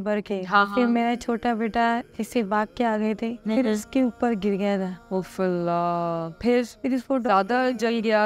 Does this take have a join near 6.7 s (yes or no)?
yes